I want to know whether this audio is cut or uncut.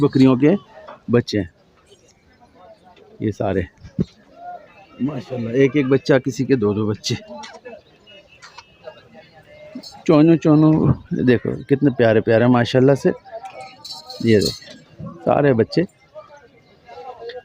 uncut